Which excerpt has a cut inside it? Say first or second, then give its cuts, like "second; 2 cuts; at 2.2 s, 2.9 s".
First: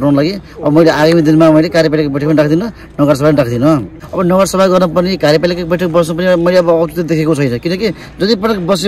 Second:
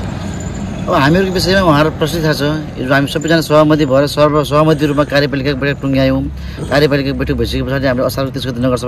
first; 1 cut; at 4.0 s